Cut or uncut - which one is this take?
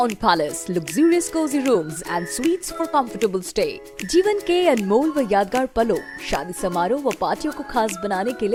uncut